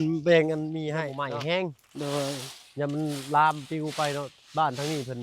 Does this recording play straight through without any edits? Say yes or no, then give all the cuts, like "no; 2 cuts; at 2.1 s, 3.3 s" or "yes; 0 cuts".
no; 1 cut; at 1.1 s